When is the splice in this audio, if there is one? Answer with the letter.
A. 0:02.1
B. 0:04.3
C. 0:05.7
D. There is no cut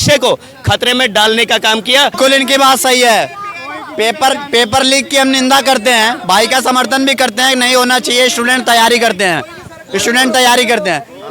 A